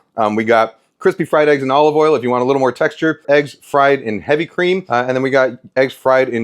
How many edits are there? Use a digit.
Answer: 2